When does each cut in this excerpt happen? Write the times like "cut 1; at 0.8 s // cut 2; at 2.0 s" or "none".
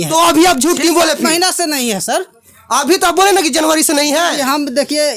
none